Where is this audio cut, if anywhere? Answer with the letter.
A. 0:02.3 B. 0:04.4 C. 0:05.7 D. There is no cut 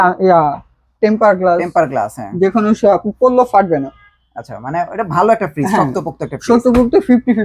D